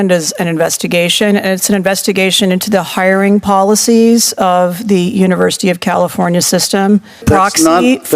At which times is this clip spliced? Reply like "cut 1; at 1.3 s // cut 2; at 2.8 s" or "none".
cut 1; at 7.2 s